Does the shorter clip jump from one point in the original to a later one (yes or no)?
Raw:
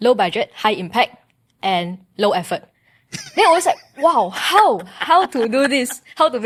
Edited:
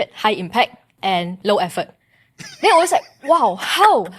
yes